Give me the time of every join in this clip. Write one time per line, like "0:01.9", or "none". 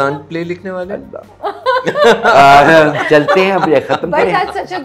none